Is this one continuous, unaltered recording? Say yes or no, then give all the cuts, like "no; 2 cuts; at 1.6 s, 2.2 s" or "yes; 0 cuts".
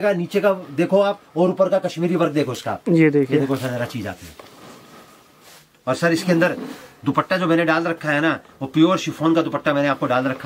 yes; 0 cuts